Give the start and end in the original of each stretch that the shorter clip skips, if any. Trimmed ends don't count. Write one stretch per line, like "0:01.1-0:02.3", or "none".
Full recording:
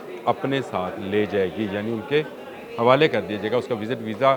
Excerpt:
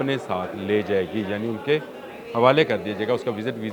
none